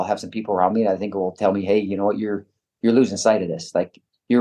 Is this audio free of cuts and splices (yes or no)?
yes